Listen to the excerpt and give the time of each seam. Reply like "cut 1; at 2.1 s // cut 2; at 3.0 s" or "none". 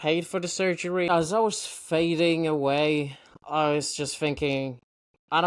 cut 1; at 1.1 s